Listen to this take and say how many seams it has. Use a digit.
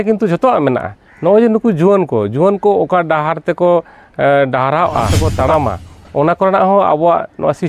1